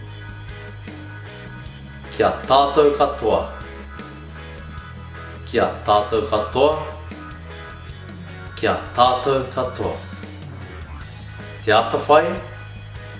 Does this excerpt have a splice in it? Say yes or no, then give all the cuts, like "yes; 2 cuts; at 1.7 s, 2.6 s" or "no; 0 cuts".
no; 0 cuts